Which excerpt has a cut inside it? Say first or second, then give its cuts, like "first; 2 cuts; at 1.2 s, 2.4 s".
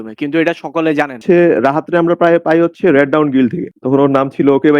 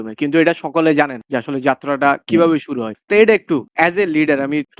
first; 2 cuts; at 1.2 s, 3.8 s